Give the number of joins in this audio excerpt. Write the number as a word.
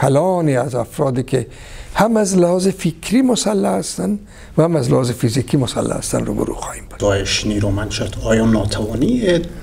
one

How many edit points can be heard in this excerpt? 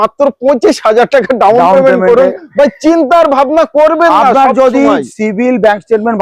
zero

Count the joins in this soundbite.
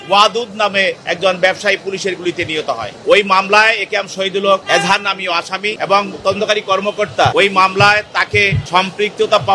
five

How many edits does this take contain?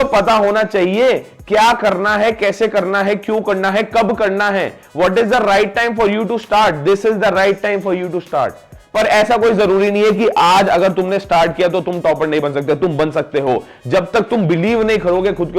one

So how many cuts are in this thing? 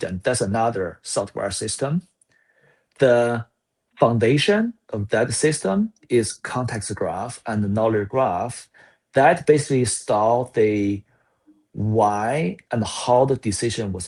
zero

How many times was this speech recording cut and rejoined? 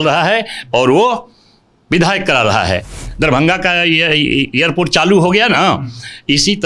one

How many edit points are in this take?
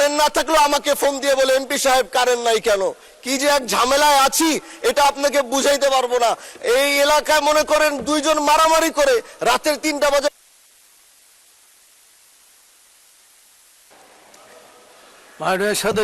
zero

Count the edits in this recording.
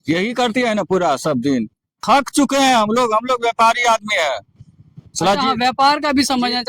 one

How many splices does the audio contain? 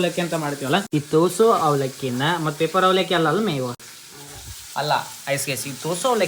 zero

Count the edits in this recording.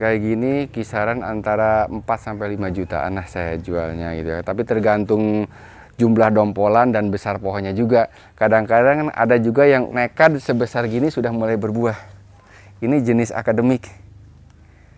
two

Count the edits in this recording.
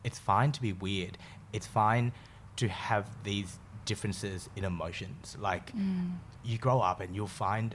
zero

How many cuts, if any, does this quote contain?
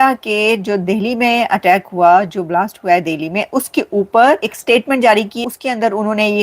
two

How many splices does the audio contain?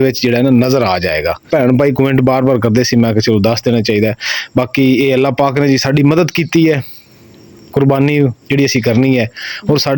one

